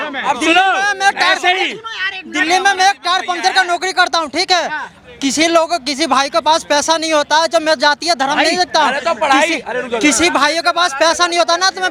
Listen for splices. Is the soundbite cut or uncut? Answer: uncut